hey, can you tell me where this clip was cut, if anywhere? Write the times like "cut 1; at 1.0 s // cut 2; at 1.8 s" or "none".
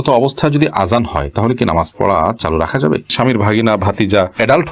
cut 1; at 3.1 s